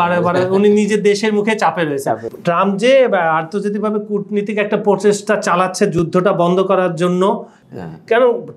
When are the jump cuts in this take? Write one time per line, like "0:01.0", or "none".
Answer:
0:02.3
0:07.5